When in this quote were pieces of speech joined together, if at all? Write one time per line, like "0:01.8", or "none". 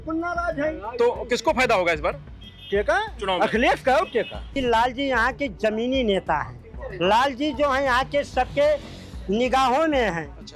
0:04.5